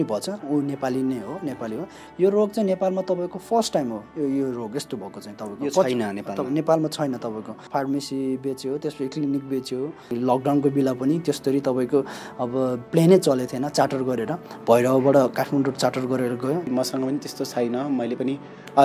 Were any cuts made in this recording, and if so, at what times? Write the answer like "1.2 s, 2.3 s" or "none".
2.0 s, 7.6 s, 10.1 s, 16.7 s